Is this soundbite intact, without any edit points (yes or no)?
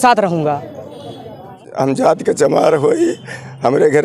no